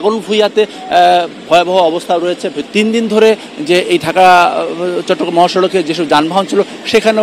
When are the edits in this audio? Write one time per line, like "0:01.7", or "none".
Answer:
0:02.6

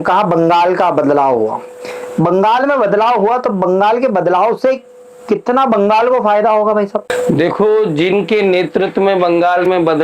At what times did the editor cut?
0:07.1

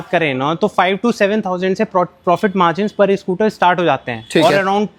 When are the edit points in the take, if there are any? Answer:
none

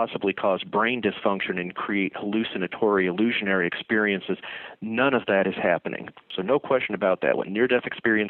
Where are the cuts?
0:06.3

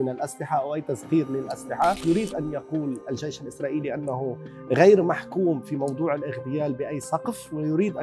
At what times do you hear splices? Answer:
0:02.0

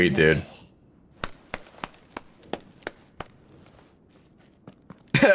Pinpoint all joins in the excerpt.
none

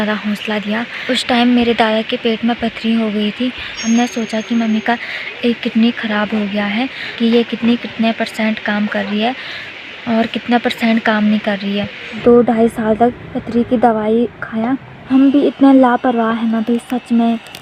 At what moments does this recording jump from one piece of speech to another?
0:00.9
0:03.8
0:07.0
0:12.2
0:15.0

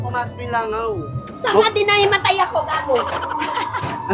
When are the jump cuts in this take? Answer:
0:01.2

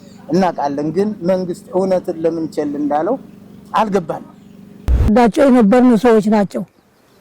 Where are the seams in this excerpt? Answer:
0:05.1

